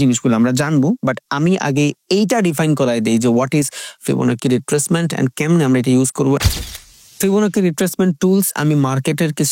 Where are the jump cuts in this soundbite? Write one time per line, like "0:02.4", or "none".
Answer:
0:06.6